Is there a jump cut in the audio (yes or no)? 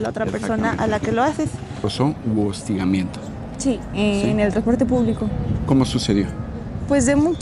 yes